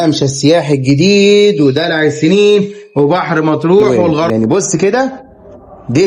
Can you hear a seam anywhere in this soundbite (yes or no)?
yes